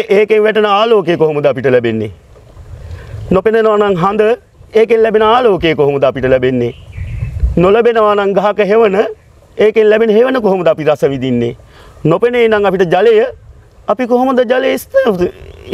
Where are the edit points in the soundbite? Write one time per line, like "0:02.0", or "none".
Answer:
none